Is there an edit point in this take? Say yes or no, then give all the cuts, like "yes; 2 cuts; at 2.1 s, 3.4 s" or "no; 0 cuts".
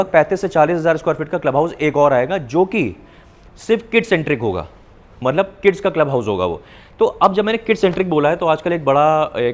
no; 0 cuts